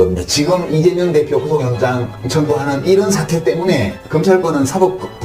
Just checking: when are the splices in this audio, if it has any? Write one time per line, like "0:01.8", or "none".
none